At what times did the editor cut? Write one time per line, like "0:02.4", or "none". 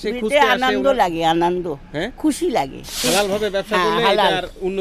0:03.0